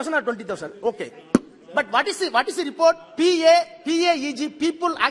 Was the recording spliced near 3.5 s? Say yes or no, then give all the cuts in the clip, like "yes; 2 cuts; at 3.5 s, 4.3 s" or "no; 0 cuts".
no; 0 cuts